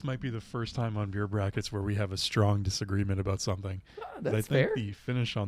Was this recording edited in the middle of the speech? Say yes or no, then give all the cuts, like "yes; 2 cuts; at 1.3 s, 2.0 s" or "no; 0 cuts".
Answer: no; 0 cuts